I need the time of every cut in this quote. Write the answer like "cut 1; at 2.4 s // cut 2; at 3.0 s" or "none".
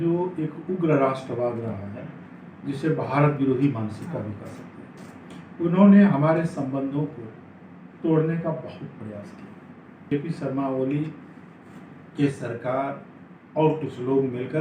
cut 1; at 10.0 s